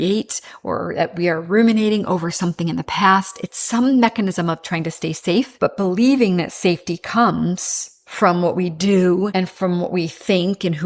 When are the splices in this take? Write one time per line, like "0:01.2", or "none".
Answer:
0:05.5
0:09.3